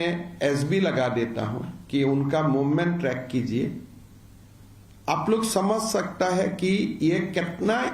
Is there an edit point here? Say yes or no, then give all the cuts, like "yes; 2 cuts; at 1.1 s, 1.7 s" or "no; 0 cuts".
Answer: no; 0 cuts